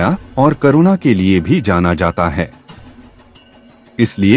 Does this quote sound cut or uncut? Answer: uncut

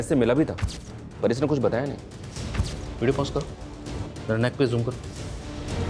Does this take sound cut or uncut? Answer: uncut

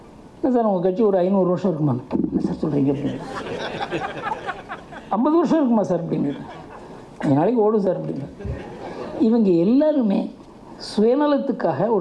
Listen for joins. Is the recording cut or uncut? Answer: uncut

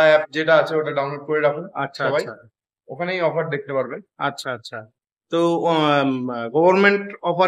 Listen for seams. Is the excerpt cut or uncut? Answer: uncut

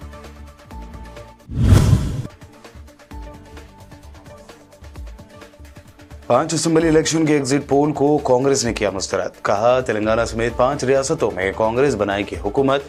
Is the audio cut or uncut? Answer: uncut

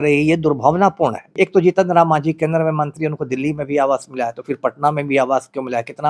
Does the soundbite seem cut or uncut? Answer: cut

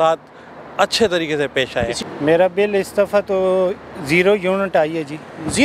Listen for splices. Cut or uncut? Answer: cut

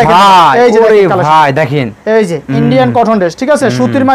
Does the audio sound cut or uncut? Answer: uncut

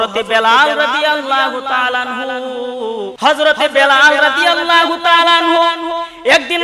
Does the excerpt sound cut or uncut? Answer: cut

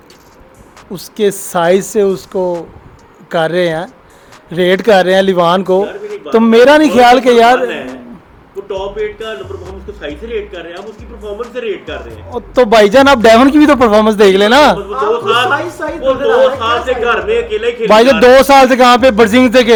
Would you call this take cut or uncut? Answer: uncut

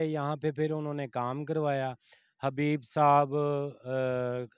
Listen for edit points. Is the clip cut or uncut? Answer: uncut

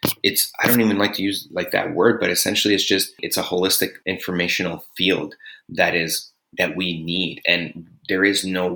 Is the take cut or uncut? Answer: cut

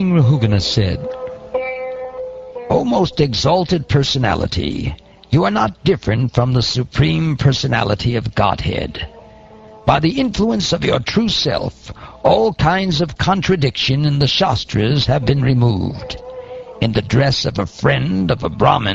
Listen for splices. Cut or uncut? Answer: cut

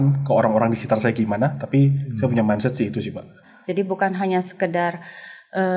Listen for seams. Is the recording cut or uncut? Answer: cut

